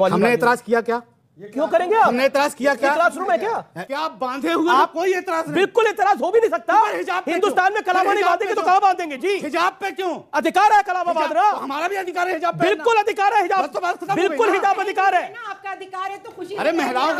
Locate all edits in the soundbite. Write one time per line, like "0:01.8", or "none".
0:03.8